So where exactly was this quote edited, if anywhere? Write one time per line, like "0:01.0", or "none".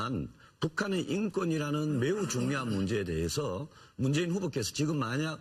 none